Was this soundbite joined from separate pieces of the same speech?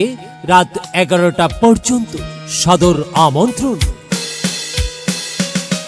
yes; 1 cut; at 3.8 s

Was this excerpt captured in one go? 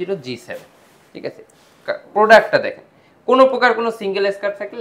yes; 0 cuts

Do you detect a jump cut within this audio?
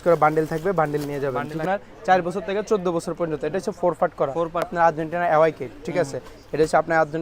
yes; 2 cuts; at 1.6 s, 4.7 s

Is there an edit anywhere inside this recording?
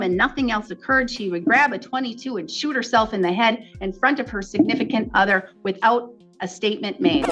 no; 0 cuts

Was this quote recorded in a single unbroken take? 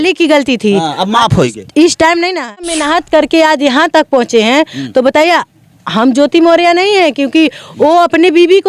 no; 1 cut; at 2.7 s

